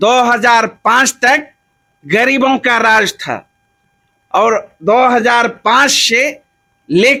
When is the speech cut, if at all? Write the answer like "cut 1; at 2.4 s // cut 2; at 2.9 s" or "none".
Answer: none